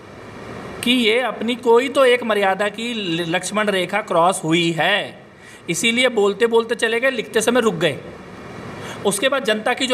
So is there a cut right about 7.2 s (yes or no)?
no